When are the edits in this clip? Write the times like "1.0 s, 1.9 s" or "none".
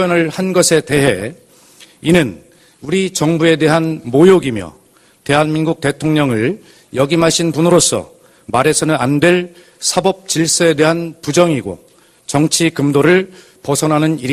none